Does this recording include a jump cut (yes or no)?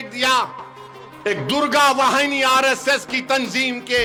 no